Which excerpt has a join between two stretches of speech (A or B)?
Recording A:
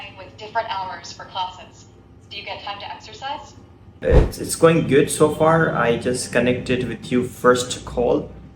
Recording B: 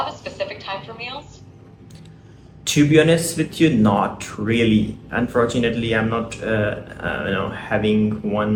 A